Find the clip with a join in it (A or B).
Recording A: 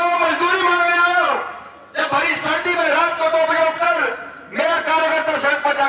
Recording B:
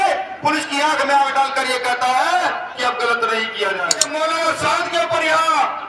B